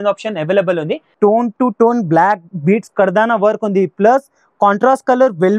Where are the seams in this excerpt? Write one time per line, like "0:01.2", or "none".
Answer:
0:01.1